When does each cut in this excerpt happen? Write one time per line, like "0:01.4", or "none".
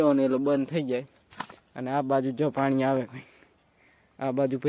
none